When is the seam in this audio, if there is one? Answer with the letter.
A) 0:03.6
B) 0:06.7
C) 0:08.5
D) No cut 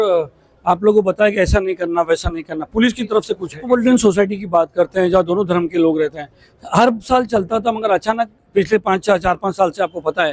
A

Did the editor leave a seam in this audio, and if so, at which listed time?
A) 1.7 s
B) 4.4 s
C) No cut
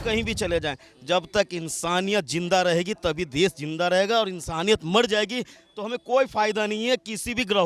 C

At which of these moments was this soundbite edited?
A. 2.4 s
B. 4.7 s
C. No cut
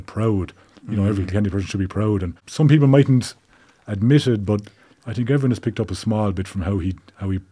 A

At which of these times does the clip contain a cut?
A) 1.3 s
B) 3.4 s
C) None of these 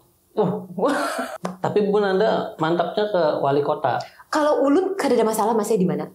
A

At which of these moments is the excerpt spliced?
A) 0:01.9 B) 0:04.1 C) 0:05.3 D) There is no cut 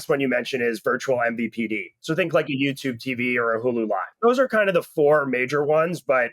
B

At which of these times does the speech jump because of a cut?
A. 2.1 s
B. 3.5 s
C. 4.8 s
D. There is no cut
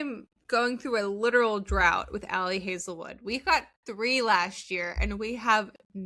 D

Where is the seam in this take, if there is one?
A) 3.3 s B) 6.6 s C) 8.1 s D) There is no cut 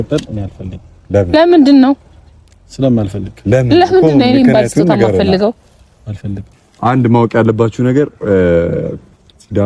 B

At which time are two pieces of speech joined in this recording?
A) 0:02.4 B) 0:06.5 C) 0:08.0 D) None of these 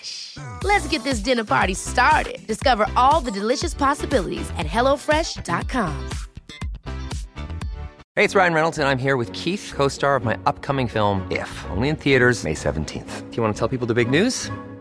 C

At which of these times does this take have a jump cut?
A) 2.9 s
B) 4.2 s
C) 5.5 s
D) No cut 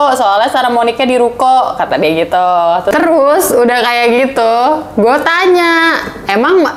A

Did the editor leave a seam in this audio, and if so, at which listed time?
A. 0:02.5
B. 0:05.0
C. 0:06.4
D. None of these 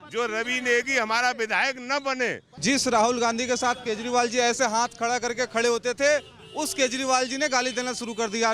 A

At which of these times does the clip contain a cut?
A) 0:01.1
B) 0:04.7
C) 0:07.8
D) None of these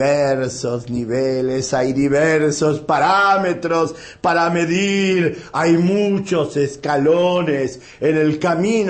A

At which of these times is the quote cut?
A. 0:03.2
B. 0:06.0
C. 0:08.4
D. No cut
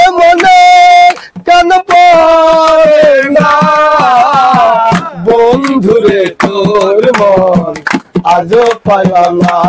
D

